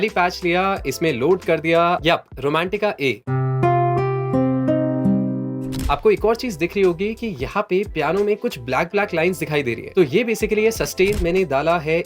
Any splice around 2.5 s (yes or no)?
no